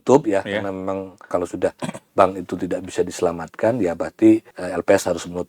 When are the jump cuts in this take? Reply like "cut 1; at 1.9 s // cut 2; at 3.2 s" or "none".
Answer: cut 1; at 1.2 s // cut 2; at 4.6 s